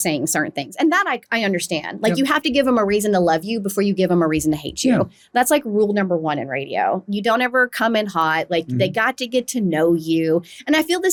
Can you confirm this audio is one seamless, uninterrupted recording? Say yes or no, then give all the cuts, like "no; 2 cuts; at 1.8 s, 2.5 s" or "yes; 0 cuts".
yes; 0 cuts